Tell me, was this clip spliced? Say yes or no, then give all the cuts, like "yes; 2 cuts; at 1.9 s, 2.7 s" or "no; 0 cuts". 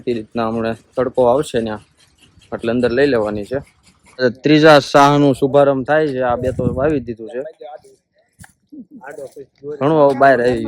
yes; 1 cut; at 4.2 s